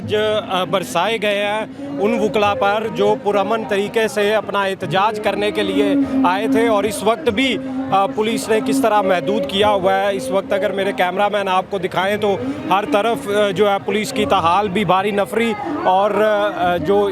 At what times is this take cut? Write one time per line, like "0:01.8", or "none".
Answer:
none